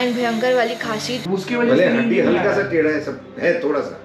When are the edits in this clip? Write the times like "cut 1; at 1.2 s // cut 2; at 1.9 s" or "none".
cut 1; at 1.1 s

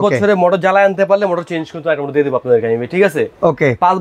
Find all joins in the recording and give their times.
none

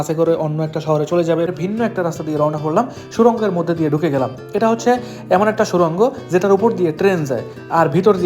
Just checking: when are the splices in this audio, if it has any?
cut 1; at 1.5 s

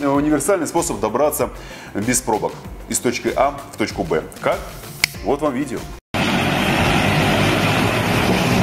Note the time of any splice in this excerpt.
none

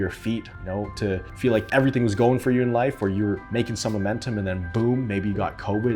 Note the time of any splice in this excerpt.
cut 1; at 3.4 s

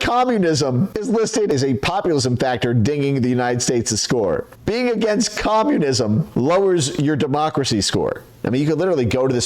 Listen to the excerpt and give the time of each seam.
cut 1; at 1.5 s // cut 2; at 4.5 s // cut 3; at 6.3 s // cut 4; at 8.4 s

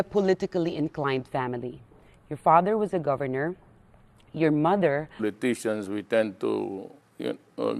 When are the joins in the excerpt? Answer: none

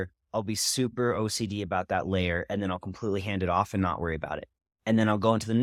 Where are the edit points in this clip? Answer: none

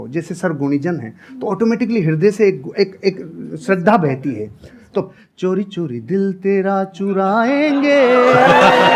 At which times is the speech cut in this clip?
cut 1; at 5.2 s

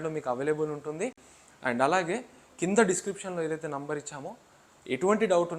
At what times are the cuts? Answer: none

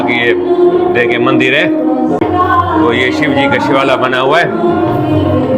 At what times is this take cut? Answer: cut 1; at 2.2 s

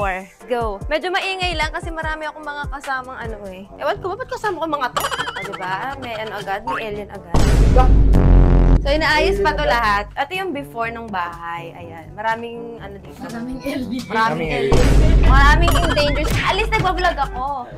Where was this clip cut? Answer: none

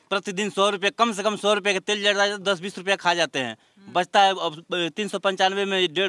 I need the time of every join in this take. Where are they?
none

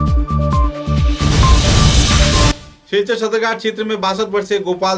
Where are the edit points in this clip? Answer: cut 1; at 2.5 s

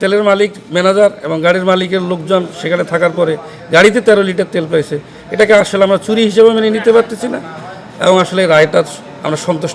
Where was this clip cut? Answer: none

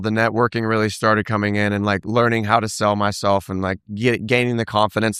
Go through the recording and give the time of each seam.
none

